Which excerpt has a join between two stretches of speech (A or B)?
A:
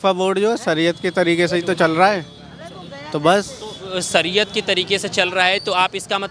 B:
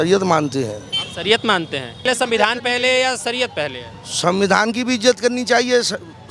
B